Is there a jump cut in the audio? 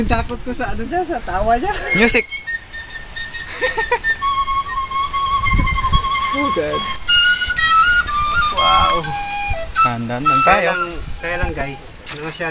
yes; 1 cut; at 6.9 s

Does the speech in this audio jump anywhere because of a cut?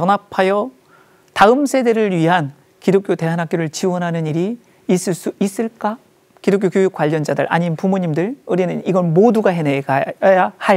yes; 1 cut; at 6.1 s

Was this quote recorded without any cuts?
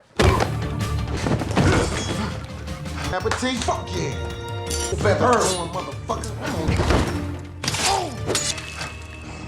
no; 1 cut; at 4.9 s

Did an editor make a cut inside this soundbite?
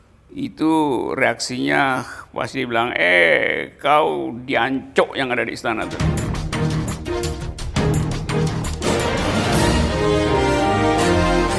yes; 1 cut; at 6.0 s

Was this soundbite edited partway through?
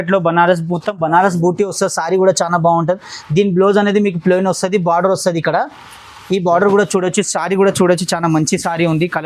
no; 0 cuts

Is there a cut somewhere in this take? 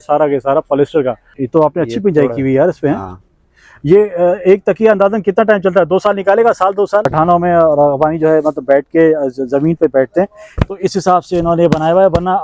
yes; 2 cuts; at 1.3 s, 7.1 s

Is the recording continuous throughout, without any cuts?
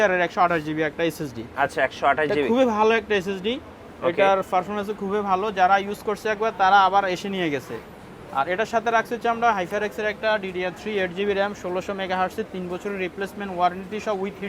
yes; 0 cuts

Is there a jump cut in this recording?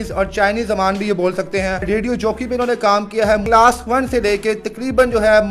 yes; 2 cuts; at 1.9 s, 3.4 s

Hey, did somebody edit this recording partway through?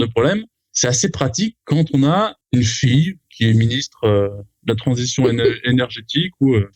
no; 0 cuts

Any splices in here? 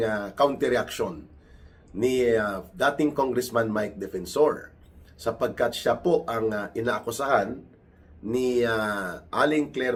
no; 0 cuts

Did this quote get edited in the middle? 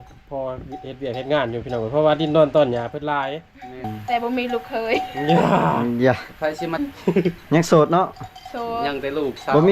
yes; 2 cuts; at 3.9 s, 6.8 s

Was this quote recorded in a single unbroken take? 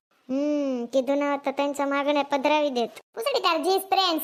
yes; 0 cuts

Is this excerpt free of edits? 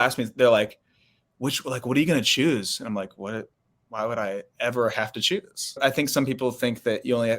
no; 1 cut; at 5.8 s

